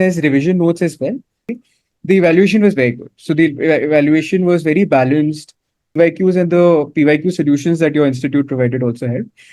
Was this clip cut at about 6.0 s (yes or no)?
yes